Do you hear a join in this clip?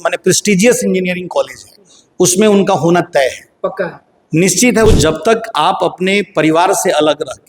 yes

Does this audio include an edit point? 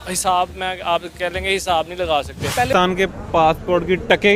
yes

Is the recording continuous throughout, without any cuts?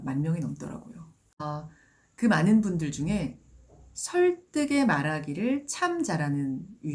no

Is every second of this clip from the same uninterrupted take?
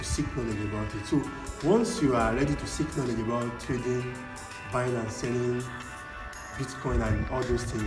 yes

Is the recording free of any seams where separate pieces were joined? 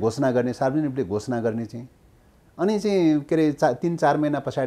yes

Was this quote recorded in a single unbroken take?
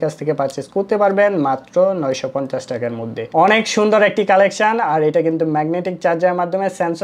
no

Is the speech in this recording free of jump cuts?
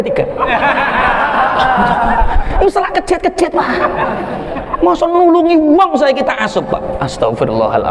yes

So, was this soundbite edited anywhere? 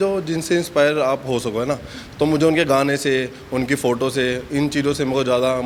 no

